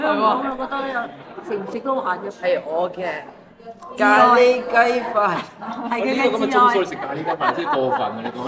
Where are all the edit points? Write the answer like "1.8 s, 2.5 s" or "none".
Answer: 2.4 s